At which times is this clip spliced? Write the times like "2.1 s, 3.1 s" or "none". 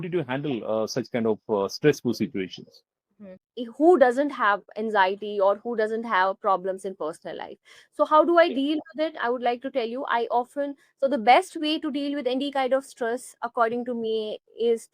3.4 s